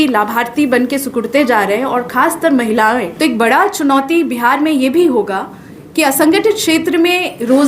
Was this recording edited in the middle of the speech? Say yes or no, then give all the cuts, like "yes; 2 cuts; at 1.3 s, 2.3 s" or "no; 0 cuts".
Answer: yes; 1 cut; at 3.1 s